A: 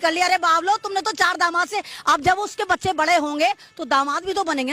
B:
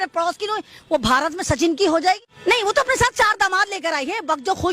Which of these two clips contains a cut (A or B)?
B